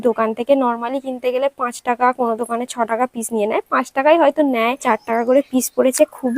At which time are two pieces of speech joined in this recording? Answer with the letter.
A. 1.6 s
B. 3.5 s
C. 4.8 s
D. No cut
C